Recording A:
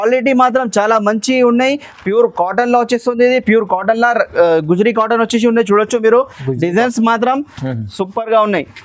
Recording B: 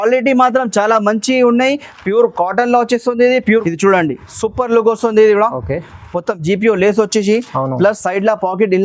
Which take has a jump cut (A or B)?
B